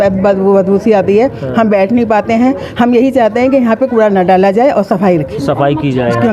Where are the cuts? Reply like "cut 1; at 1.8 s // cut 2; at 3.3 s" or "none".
none